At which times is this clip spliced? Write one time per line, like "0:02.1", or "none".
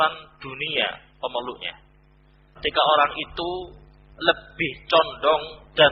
0:02.6